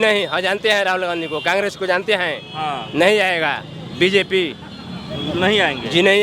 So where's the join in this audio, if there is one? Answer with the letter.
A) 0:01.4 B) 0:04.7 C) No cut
C